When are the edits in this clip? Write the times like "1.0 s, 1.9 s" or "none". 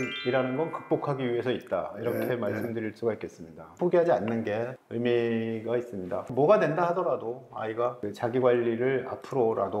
3.7 s